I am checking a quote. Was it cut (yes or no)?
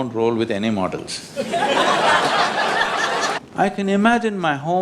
yes